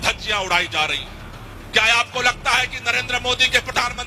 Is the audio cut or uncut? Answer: uncut